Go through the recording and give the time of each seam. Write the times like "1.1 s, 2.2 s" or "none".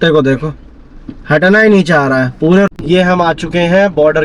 2.7 s